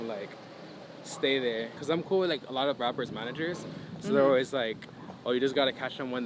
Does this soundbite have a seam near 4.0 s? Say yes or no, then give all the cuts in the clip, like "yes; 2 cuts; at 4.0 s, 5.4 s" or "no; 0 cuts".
no; 1 cut; at 1.7 s